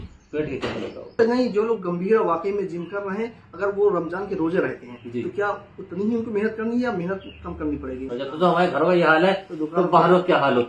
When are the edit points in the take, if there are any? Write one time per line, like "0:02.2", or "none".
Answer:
0:01.2
0:08.1